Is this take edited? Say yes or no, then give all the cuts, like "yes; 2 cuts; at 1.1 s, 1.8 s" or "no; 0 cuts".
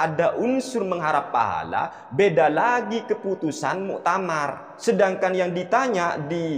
yes; 1 cut; at 4.7 s